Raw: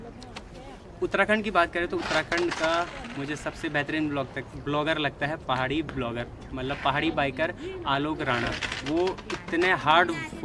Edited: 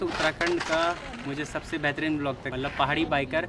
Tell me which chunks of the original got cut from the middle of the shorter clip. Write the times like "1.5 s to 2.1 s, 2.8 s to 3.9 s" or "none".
4.4 s to 6.5 s